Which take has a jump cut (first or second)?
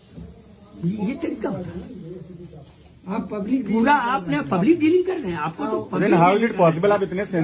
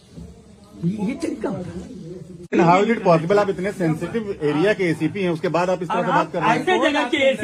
second